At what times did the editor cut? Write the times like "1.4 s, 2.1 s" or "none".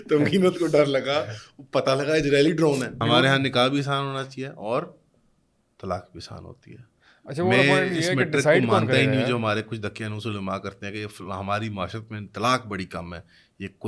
3.0 s